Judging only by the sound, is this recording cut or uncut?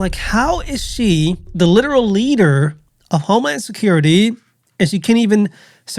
cut